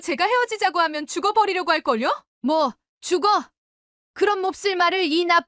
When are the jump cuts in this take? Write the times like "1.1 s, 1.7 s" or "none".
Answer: none